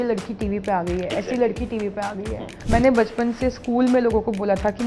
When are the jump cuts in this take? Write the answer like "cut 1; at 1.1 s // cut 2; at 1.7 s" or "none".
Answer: cut 1; at 2.5 s